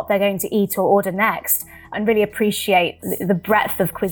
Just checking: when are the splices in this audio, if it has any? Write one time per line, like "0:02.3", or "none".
0:01.9
0:03.0